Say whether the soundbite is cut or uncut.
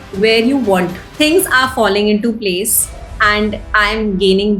cut